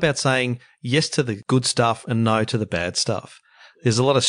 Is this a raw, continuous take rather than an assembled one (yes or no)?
no